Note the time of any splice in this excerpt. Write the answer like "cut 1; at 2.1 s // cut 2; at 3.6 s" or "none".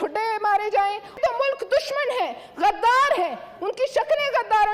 cut 1; at 1.1 s